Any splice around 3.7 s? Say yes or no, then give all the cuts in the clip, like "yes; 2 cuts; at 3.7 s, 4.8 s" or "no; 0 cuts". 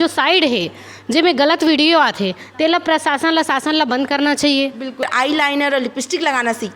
no; 1 cut; at 5.0 s